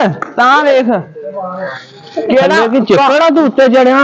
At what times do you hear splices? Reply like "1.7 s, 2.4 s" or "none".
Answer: none